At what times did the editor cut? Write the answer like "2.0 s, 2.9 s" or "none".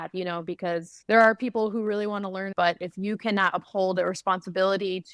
0.9 s, 2.5 s

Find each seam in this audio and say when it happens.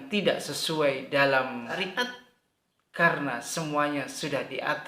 1.7 s

